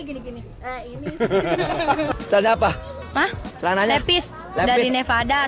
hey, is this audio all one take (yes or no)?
no